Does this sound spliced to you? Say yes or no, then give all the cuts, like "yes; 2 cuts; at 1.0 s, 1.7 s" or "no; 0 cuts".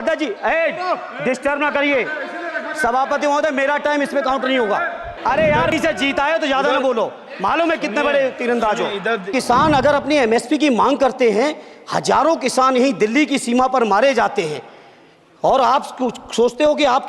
yes; 2 cuts; at 5.1 s, 9.3 s